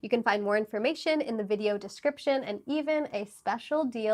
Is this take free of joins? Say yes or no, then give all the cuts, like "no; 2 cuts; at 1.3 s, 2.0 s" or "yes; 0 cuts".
yes; 0 cuts